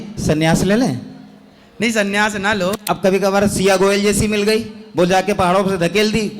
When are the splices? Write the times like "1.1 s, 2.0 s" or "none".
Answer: 2.8 s